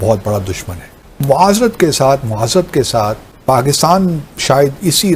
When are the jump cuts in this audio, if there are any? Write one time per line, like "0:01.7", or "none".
0:00.9
0:03.3